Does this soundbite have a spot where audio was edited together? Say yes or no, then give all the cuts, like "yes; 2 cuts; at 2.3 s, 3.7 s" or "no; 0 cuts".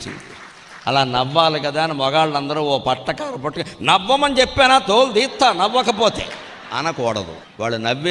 no; 0 cuts